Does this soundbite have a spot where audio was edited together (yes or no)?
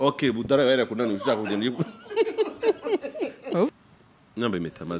yes